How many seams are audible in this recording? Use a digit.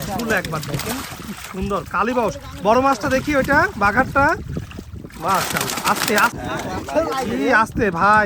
1